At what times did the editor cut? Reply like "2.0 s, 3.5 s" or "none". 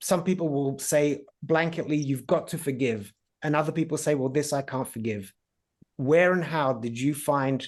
none